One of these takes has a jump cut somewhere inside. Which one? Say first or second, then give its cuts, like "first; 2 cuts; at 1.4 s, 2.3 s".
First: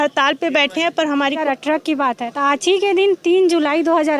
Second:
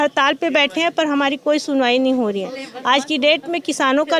first; 1 cut; at 1.4 s